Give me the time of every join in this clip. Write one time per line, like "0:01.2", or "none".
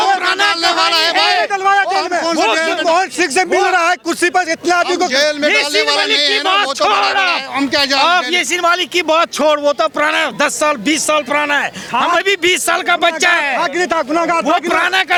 none